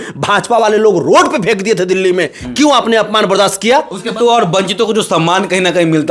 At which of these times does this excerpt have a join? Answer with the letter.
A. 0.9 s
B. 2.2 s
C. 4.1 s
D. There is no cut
C